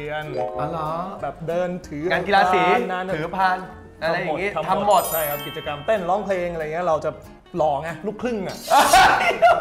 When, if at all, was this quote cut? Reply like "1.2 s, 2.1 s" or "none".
none